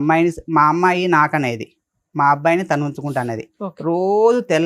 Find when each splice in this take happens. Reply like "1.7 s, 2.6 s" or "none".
none